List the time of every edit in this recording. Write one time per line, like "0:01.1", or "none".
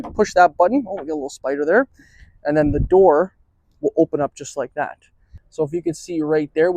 0:05.4

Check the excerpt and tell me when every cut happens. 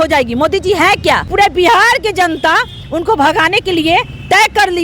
0:01.3

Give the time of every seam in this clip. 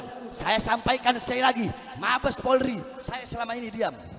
none

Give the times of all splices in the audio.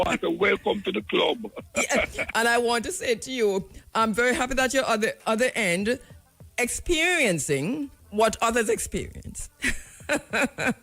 0:08.0

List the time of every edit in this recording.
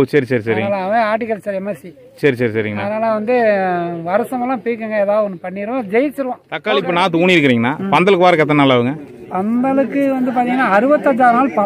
0:06.5

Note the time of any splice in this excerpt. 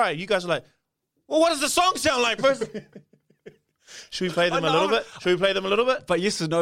none

